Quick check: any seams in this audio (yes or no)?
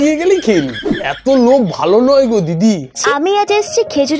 yes